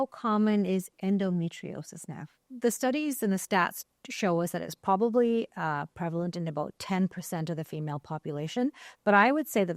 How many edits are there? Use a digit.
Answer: 2